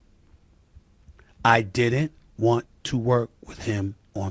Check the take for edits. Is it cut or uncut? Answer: uncut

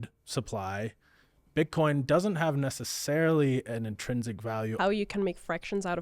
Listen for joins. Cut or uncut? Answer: cut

